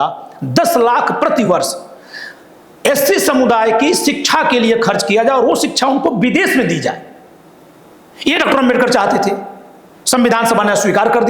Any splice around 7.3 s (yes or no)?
no